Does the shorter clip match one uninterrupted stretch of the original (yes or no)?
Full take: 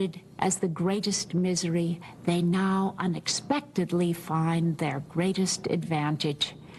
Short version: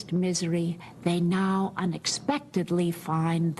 yes